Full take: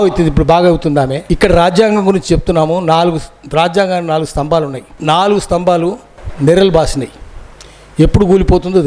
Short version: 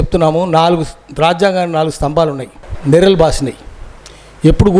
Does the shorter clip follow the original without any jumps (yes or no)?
no